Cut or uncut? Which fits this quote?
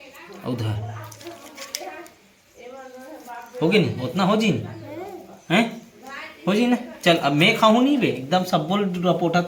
uncut